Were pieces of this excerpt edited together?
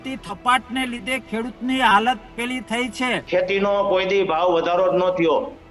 yes; 1 cut; at 3.2 s

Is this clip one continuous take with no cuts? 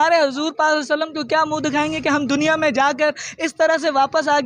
yes; 0 cuts

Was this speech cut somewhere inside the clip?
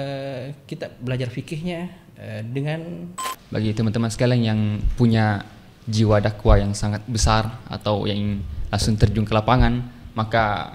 yes; 1 cut; at 3.2 s

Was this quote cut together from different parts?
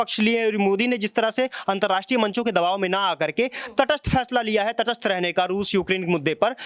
no; 0 cuts

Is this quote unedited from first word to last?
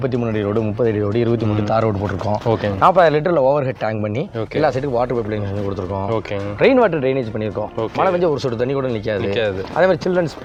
yes; 0 cuts

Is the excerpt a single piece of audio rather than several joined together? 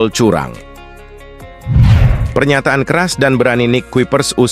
no; 2 cuts; at 1.1 s, 2.2 s

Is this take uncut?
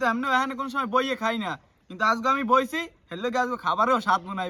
yes; 0 cuts

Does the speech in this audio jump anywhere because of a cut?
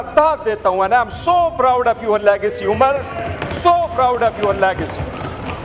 no; 0 cuts

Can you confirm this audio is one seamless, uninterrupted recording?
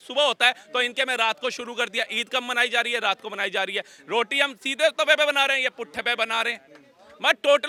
yes; 0 cuts

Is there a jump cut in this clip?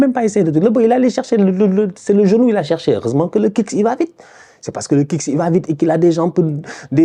no; 0 cuts

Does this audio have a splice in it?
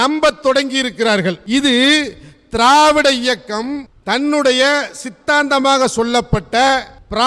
no; 0 cuts

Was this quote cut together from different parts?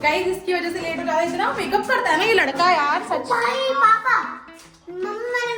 no; 0 cuts

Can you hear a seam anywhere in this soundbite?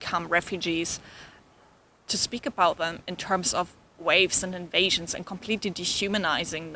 no; 0 cuts

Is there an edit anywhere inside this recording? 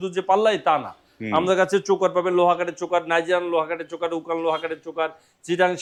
no; 0 cuts

